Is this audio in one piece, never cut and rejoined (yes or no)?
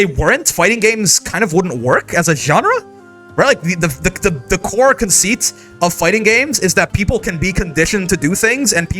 yes